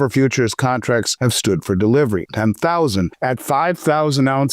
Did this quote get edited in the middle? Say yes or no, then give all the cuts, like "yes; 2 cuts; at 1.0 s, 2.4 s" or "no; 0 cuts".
yes; 3 cuts; at 1.1 s, 2.3 s, 3.1 s